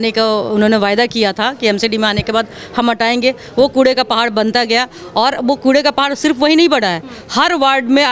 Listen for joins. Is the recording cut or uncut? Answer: uncut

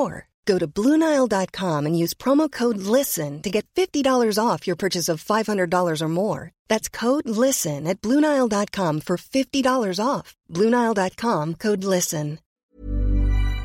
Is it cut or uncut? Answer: cut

